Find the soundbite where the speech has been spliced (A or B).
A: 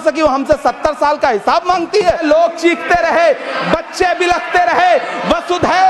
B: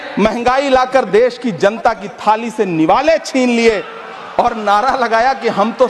A